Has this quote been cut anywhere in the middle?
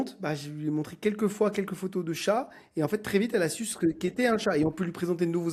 no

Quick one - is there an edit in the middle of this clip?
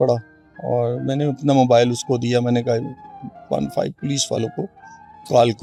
no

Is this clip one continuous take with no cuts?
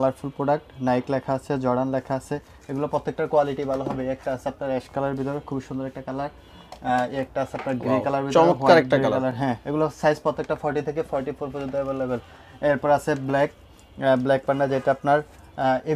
yes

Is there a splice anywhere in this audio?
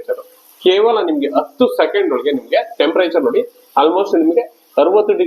no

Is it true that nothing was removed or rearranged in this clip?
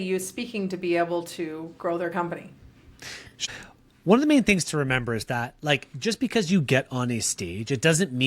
no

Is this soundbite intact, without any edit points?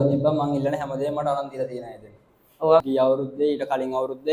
no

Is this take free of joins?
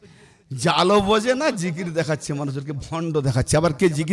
yes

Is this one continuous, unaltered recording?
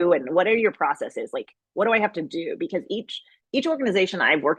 yes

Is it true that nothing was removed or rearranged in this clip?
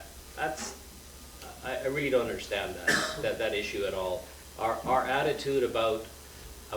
no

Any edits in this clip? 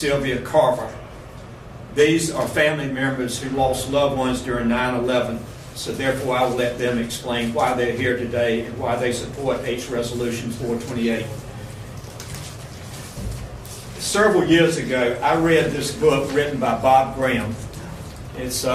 no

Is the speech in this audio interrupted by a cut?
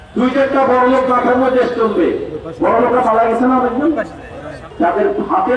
yes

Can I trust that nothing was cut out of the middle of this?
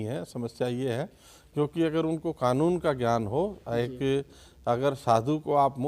yes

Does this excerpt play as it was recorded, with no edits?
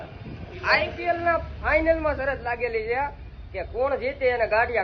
yes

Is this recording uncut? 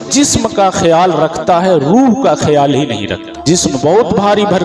no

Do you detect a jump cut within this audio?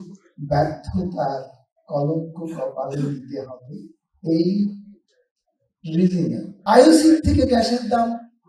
yes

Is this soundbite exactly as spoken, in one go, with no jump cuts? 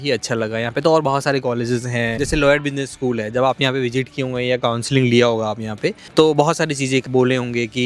no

